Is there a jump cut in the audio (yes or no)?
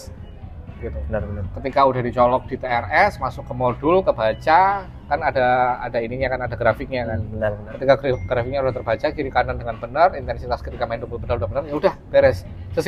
no